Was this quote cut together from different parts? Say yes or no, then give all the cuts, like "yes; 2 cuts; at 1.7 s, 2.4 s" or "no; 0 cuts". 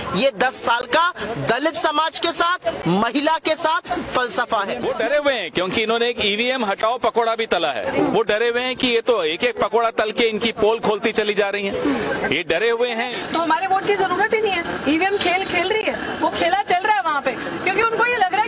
yes; 3 cuts; at 4.9 s, 13.2 s, 17.5 s